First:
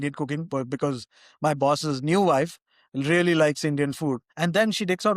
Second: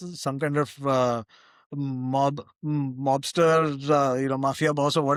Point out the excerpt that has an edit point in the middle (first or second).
first